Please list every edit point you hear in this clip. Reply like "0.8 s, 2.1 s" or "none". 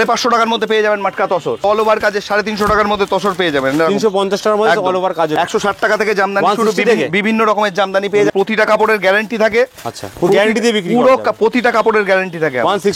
1.6 s, 5.4 s, 8.3 s